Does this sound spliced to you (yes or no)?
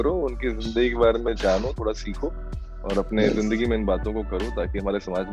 no